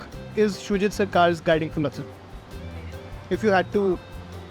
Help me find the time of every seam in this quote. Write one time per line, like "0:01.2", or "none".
none